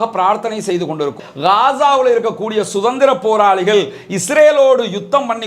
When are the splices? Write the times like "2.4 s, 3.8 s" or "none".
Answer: 1.2 s